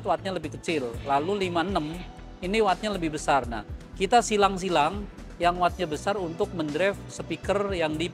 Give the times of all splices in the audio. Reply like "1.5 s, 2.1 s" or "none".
none